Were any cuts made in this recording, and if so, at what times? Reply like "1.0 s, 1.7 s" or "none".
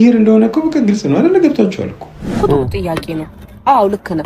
2.4 s